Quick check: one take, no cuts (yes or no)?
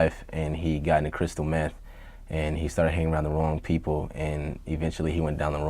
no